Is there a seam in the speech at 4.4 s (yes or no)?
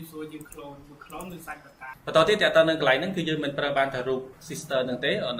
yes